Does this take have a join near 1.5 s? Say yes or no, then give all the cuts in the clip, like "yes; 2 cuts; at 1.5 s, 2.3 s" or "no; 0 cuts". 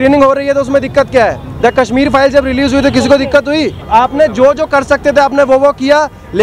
no; 1 cut; at 3.8 s